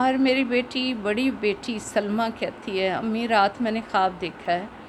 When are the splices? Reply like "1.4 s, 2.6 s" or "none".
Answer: none

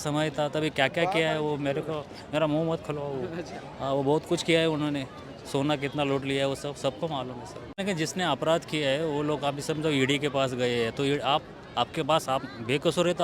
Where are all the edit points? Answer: 7.8 s

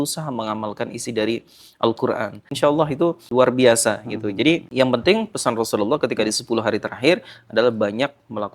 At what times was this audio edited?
2.4 s, 3.3 s, 4.7 s

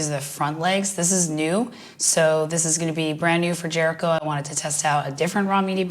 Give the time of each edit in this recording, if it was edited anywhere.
none

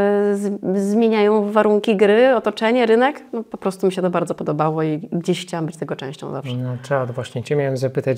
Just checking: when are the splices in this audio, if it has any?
none

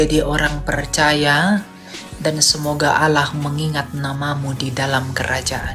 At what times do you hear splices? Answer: none

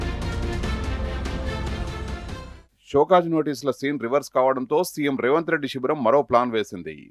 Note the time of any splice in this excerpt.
2.1 s

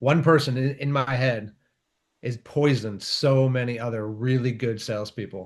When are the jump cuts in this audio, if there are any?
none

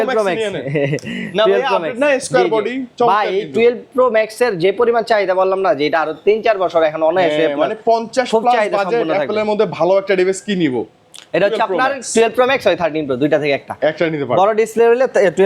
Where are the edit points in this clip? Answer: none

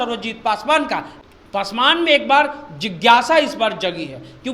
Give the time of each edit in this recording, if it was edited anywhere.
1.1 s

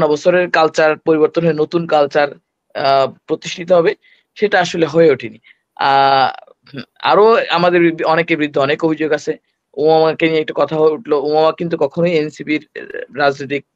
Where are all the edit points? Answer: none

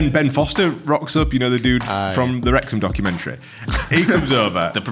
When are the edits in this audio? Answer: none

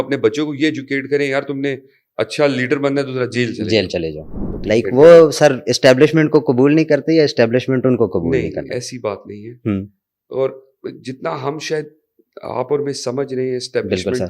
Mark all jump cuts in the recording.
4.5 s

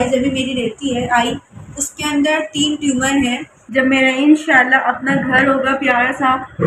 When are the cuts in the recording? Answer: 3.5 s

